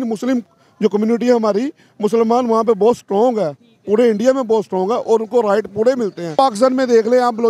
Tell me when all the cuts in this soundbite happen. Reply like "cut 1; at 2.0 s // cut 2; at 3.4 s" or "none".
cut 1; at 6.3 s